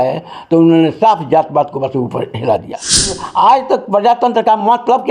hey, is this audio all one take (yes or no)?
no